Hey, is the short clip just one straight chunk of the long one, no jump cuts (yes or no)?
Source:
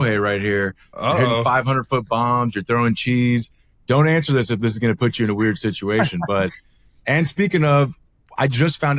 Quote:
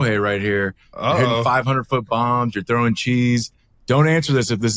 yes